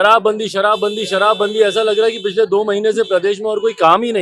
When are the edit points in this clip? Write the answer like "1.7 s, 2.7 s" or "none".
none